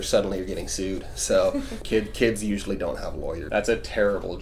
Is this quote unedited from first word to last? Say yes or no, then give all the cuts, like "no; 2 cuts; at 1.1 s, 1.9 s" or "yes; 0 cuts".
no; 2 cuts; at 1.8 s, 3.4 s